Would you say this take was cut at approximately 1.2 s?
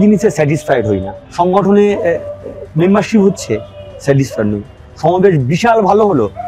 yes; 1 cut; at 1.2 s

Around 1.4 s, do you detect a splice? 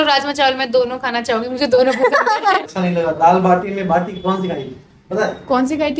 no; 1 cut; at 2.7 s

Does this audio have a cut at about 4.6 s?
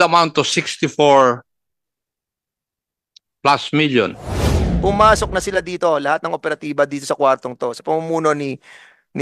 yes; 1 cut; at 4.6 s

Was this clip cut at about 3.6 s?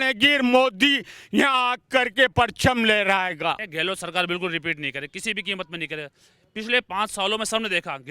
yes; 1 cut; at 3.6 s

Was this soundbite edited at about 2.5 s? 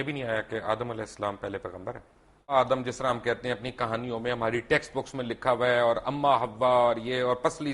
yes; 1 cut; at 2.5 s

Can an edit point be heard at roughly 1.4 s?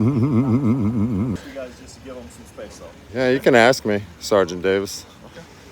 yes; 1 cut; at 1.4 s

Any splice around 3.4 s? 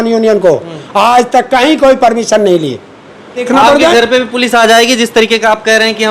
yes; 1 cut; at 3.4 s

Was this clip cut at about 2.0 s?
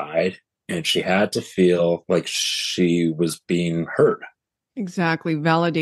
yes; 1 cut; at 2.0 s

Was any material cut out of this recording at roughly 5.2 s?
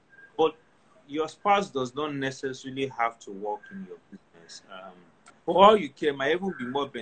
yes; 1 cut; at 5.2 s

